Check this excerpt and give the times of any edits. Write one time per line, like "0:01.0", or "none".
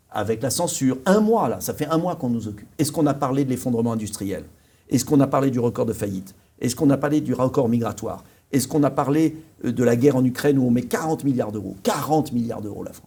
none